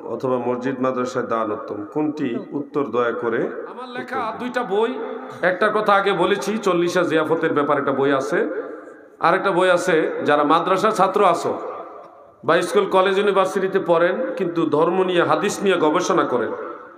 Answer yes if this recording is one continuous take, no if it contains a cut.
no